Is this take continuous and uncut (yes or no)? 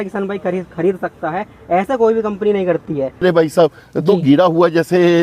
no